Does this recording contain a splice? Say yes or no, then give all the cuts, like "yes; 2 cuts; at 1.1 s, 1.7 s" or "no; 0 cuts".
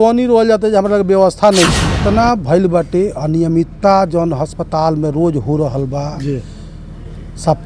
yes; 1 cut; at 2.0 s